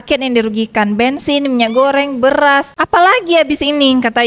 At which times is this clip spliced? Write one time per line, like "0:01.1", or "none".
none